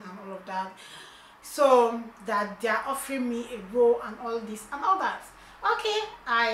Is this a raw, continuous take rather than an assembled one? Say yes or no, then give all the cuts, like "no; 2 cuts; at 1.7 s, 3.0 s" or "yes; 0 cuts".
yes; 0 cuts